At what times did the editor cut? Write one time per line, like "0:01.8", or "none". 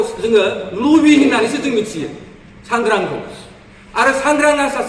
none

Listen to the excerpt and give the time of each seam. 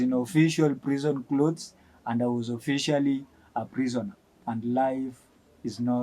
0:04.3

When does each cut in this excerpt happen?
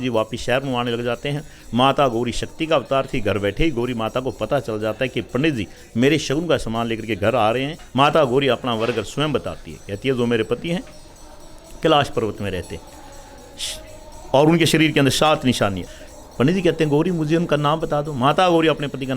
0:07.8
0:15.8

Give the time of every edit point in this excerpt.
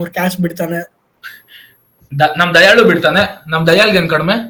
none

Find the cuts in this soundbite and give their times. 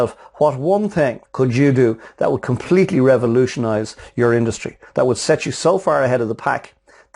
0:01.2

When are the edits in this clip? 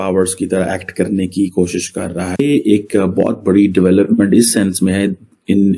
0:02.4

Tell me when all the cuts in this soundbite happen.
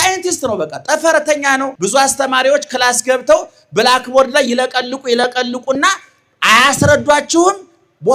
0:01.7

